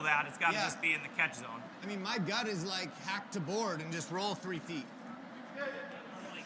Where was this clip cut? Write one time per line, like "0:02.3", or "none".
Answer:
0:01.1